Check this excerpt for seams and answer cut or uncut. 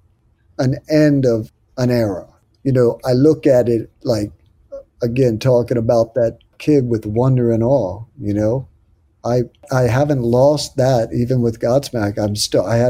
cut